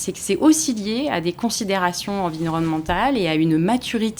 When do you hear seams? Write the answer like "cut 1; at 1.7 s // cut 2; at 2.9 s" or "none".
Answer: none